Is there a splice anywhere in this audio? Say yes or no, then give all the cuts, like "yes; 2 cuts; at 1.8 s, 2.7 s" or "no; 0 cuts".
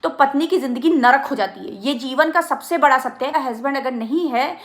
yes; 1 cut; at 3.3 s